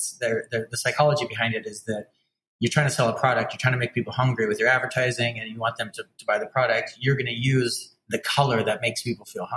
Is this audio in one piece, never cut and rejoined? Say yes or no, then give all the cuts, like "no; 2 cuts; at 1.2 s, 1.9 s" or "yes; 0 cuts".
yes; 0 cuts